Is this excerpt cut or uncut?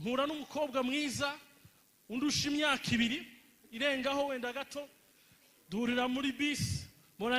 uncut